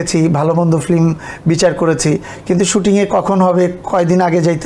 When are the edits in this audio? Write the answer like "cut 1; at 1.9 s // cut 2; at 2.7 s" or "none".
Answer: none